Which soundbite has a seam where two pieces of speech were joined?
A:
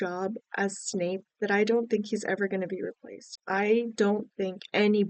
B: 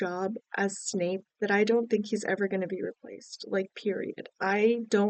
A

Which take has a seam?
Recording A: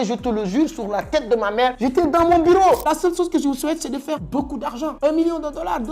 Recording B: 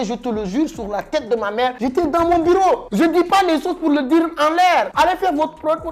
A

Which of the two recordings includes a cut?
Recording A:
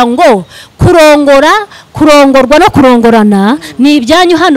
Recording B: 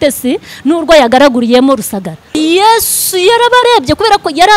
B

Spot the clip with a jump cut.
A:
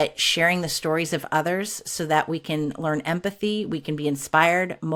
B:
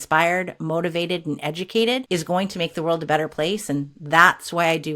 B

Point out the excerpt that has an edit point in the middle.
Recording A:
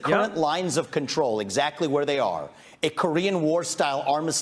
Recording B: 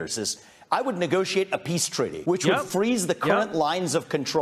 B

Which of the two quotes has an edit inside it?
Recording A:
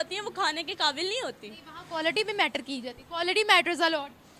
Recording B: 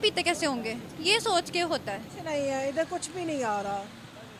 B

